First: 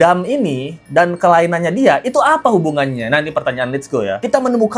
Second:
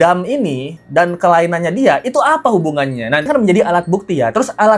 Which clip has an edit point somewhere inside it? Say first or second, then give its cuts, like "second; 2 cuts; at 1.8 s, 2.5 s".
second; 1 cut; at 3.3 s